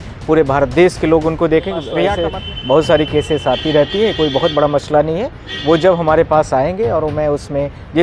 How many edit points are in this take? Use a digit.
1